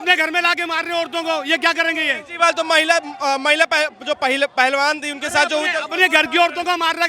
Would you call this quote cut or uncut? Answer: uncut